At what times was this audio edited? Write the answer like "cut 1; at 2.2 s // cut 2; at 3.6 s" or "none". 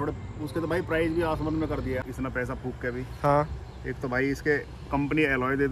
cut 1; at 2.0 s

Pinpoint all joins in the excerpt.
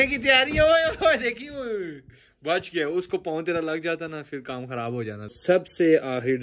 cut 1; at 5.4 s

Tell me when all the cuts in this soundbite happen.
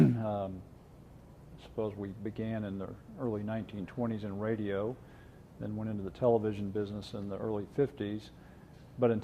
cut 1; at 6.4 s

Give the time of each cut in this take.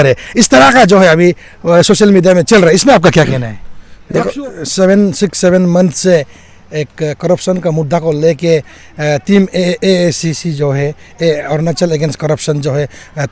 cut 1; at 4.3 s

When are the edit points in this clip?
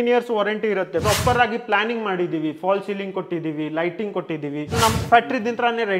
cut 1; at 1.0 s // cut 2; at 4.8 s

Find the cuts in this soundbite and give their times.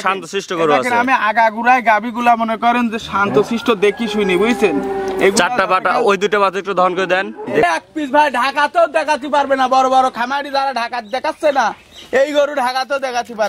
cut 1; at 7.6 s

